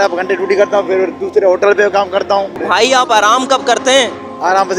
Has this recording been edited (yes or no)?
yes